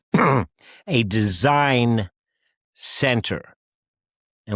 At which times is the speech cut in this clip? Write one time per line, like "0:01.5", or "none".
none